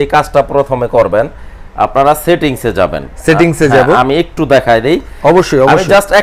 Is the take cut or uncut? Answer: uncut